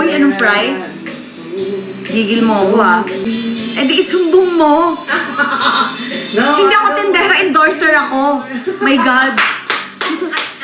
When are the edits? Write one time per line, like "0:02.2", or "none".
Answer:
0:03.2